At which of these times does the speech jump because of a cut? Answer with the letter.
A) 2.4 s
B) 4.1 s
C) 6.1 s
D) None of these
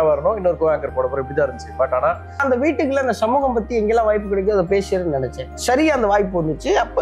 A